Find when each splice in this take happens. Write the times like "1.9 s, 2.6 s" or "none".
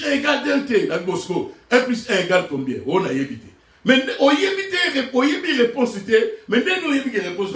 none